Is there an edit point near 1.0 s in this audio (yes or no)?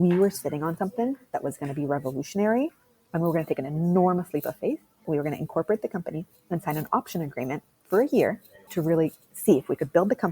no